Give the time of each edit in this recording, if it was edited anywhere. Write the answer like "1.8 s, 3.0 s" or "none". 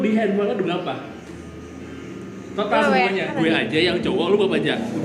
3.3 s